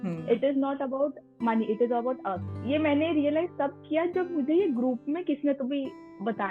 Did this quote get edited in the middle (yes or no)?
yes